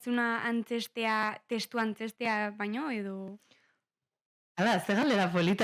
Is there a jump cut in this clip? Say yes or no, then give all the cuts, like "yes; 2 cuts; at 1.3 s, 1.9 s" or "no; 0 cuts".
no; 0 cuts